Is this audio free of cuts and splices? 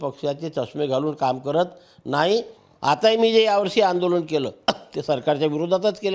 no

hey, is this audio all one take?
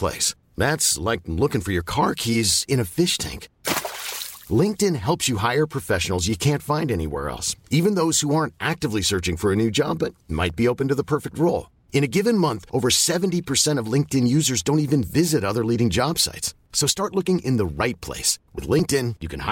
yes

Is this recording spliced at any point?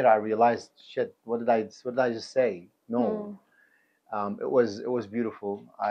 no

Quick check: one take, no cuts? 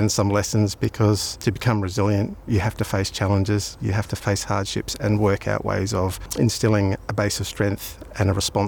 no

